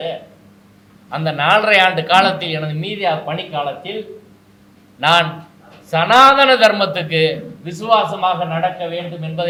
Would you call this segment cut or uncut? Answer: uncut